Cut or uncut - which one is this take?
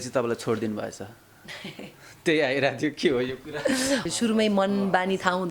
cut